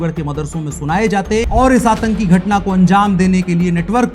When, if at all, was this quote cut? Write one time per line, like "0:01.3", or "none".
0:01.5